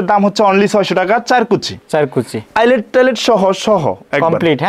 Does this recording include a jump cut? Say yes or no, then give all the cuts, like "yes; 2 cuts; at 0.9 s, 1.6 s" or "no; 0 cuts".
no; 0 cuts